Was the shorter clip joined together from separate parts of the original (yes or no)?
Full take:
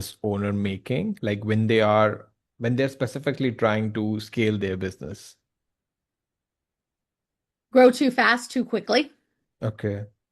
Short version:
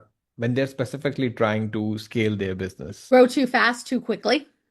yes